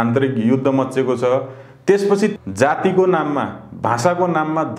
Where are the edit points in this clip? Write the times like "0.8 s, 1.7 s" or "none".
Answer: 2.3 s